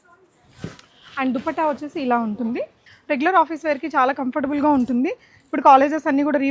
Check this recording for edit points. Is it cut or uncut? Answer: cut